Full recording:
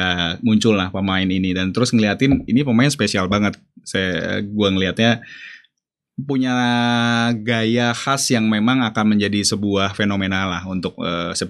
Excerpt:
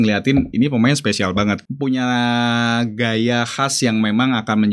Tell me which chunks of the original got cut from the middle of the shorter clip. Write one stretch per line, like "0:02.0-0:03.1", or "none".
0:03.6-0:06.2